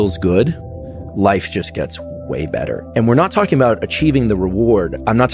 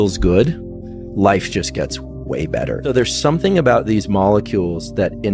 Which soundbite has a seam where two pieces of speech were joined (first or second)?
second